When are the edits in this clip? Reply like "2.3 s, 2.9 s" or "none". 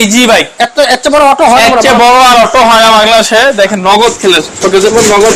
none